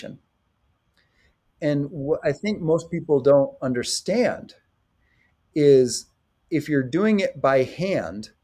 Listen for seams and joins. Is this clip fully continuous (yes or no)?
yes